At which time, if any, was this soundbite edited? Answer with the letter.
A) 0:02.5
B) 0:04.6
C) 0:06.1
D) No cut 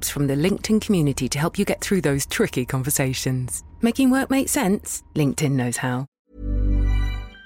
C